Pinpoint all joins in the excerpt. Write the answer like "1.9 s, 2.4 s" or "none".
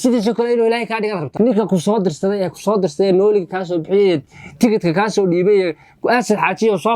1.2 s

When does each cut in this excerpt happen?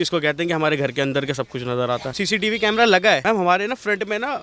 2.1 s, 3.2 s

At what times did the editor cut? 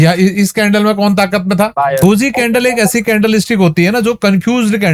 2.0 s

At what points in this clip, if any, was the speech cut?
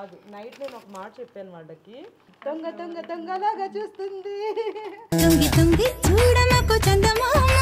2.1 s

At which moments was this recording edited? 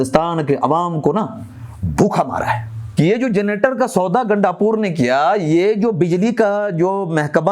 2.8 s

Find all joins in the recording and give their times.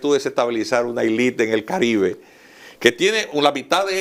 none

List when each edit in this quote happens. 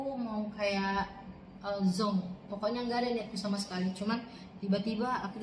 none

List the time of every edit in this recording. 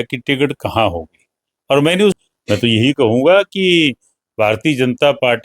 2.2 s

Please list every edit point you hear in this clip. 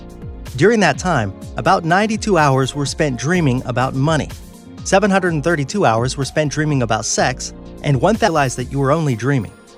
none

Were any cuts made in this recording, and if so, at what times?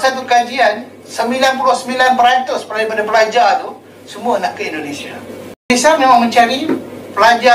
5.7 s

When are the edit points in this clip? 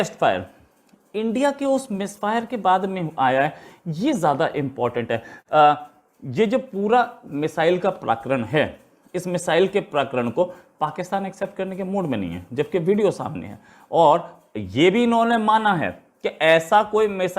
5.3 s

